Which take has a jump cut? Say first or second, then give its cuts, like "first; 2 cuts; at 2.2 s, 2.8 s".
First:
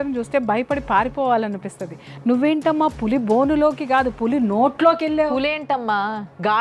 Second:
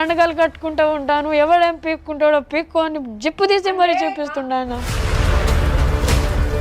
second; 1 cut; at 4.9 s